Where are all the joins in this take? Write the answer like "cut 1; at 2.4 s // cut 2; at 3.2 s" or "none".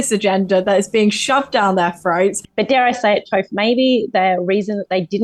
cut 1; at 2.4 s